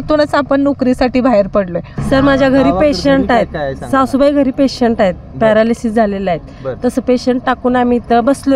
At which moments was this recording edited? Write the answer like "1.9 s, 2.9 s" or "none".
1.9 s